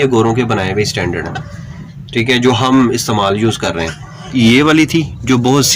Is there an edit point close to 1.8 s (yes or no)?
no